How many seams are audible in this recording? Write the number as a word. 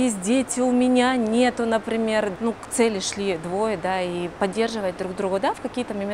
one